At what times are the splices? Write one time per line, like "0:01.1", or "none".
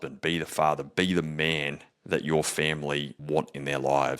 0:03.2